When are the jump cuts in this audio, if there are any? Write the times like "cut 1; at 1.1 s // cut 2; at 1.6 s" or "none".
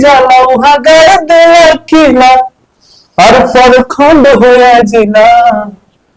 none